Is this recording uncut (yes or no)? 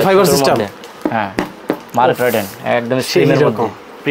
yes